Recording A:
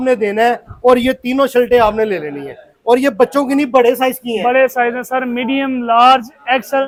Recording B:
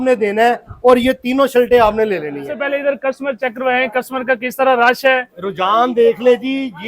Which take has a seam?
B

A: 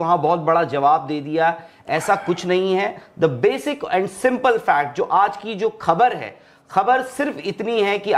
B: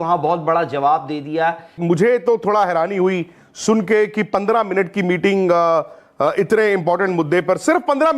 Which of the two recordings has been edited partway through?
B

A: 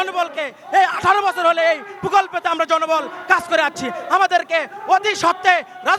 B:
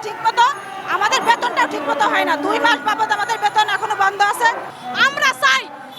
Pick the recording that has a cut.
B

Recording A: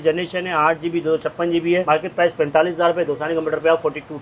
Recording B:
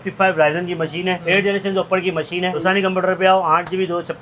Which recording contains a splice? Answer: B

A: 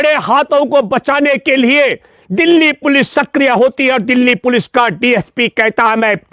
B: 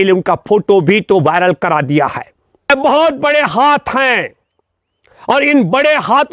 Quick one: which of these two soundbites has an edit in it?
B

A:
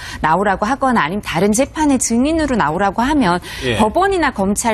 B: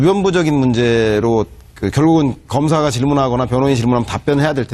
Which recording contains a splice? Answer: A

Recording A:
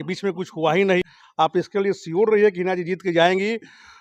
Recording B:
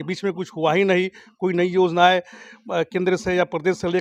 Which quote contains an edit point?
A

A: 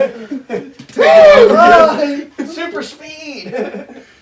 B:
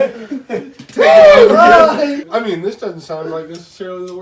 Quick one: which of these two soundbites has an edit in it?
B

